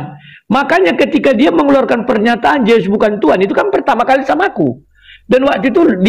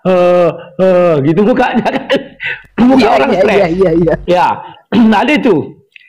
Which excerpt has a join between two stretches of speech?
second; 1 cut; at 2.0 s

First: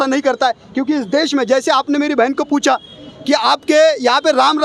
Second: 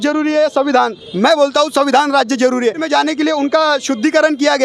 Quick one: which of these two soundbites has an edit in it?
second; 1 cut; at 2.8 s

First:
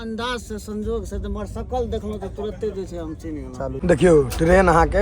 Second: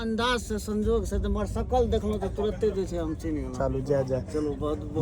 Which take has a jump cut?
first; 1 cut; at 3.8 s

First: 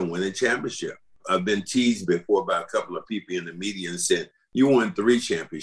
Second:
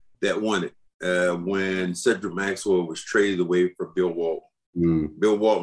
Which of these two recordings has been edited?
first; 2 cuts; at 1.2 s, 4.4 s

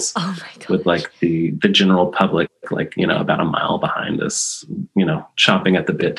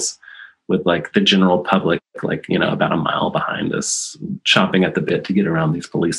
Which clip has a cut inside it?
second; 2 cuts; at 1.1 s, 4.4 s

